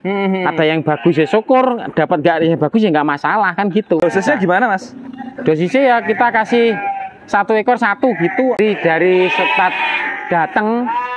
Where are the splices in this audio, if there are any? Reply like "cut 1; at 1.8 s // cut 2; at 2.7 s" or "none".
cut 1; at 4.0 s // cut 2; at 8.6 s